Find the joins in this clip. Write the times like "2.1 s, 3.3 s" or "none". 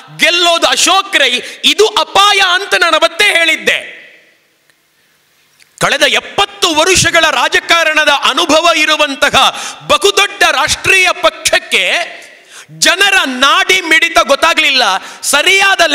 none